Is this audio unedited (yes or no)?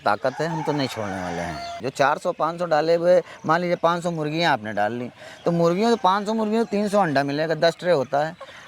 no